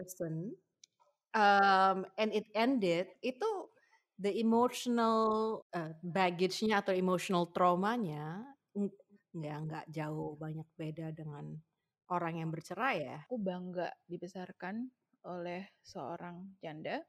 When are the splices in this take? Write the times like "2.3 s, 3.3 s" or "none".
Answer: 5.6 s, 13.2 s